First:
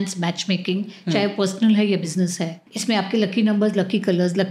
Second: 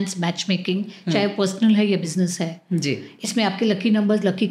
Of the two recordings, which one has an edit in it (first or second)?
first